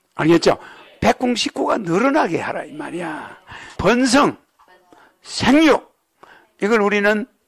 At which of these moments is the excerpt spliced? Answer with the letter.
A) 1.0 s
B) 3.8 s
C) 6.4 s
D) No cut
B